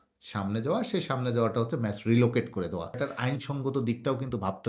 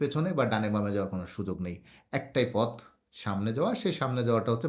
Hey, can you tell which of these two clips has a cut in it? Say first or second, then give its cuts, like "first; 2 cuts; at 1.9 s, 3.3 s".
first; 1 cut; at 3.0 s